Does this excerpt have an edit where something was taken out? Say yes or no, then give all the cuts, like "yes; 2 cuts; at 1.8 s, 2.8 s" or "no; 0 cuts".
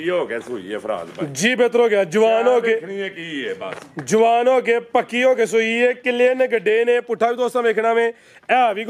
no; 0 cuts